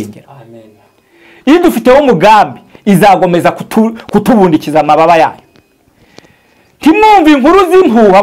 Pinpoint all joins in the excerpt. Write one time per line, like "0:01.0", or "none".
none